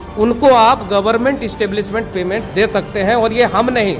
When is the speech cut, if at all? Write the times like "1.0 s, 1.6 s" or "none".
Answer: none